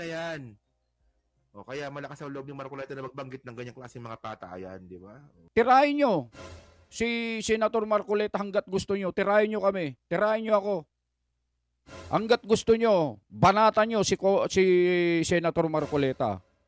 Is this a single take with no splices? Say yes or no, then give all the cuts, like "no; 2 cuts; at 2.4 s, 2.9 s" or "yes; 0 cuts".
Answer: no; 1 cut; at 5.4 s